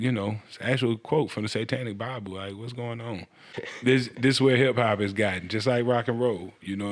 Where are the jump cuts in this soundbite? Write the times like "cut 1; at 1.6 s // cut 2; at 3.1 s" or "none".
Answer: cut 1; at 3.5 s